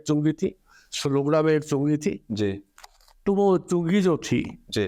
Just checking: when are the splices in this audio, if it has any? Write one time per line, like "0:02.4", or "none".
none